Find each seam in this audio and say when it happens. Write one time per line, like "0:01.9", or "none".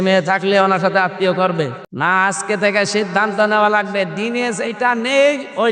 0:01.8